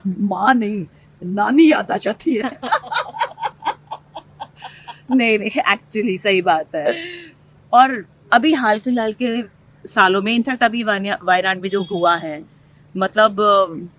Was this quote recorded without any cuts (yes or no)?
yes